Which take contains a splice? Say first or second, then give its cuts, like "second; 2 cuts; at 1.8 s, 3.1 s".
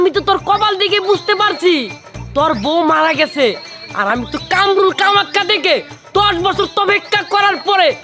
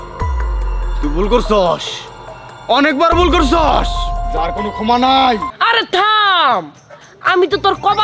second; 1 cut; at 5.5 s